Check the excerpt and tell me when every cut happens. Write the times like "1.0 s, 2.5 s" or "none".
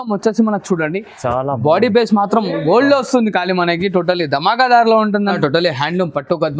5.4 s